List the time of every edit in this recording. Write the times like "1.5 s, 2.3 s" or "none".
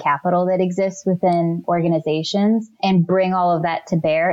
2.8 s